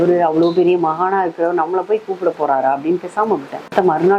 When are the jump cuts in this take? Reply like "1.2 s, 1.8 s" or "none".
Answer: none